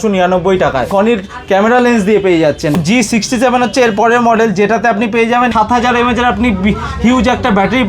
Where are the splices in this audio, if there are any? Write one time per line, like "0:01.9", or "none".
0:00.9
0:02.8
0:05.5